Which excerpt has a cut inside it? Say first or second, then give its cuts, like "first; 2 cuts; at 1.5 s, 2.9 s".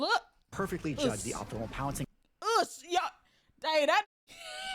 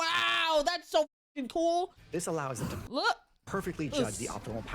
second; 1 cut; at 2.0 s